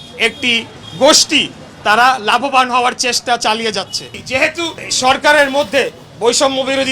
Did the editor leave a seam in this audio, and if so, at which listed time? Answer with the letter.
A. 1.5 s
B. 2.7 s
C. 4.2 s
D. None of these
C